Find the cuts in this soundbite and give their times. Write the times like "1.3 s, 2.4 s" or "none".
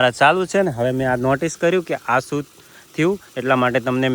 none